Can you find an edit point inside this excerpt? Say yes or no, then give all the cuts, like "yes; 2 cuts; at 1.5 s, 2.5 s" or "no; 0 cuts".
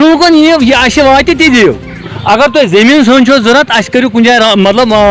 no; 0 cuts